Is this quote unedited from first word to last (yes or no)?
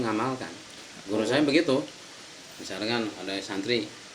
yes